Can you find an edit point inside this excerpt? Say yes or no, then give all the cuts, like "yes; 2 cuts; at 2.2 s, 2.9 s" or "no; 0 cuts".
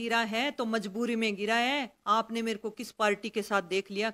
no; 0 cuts